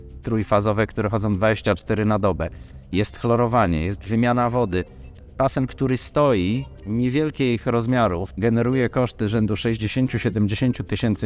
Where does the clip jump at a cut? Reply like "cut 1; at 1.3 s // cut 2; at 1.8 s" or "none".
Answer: cut 1; at 5.1 s // cut 2; at 8.3 s